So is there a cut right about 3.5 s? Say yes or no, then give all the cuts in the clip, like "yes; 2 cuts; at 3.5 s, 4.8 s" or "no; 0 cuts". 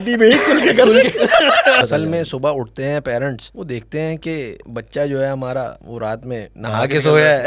yes; 3 cuts; at 1.8 s, 3.5 s, 5.8 s